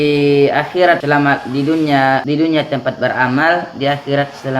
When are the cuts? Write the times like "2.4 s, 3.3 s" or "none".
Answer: 1.0 s, 2.2 s